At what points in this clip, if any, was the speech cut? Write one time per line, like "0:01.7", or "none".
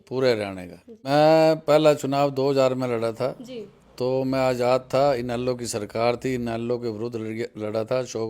0:01.1

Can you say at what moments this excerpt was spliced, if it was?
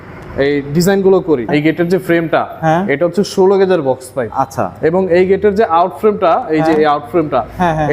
0:01.5

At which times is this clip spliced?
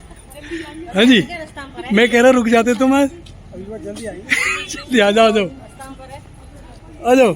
none

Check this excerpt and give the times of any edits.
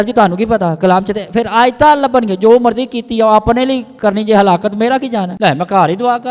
0:05.3

